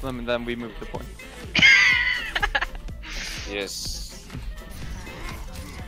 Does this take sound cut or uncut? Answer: uncut